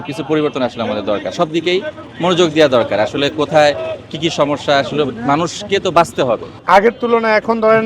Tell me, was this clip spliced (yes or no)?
yes